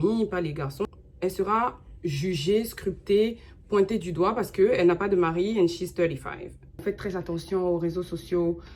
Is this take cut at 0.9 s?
yes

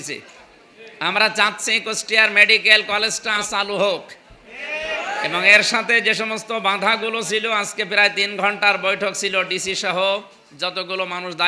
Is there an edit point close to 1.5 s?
no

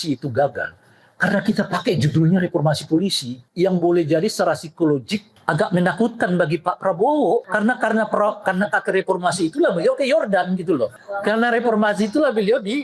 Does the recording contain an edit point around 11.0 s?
yes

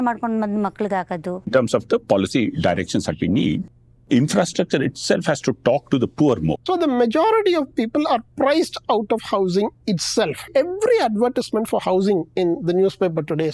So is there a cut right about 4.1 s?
no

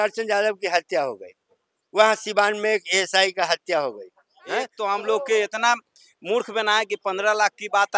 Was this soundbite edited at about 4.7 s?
yes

